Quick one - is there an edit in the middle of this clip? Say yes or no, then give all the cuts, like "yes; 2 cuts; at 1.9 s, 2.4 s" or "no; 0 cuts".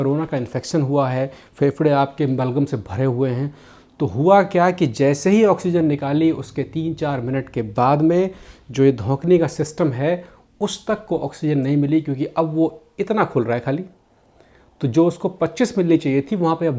no; 0 cuts